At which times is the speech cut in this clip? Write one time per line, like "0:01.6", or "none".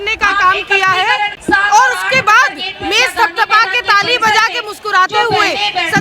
0:01.3